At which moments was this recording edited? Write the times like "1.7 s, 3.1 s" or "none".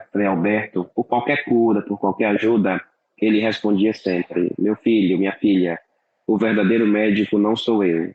none